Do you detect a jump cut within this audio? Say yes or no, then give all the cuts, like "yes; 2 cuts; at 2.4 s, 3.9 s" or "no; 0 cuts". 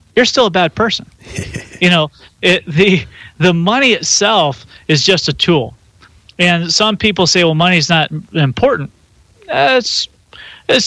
no; 0 cuts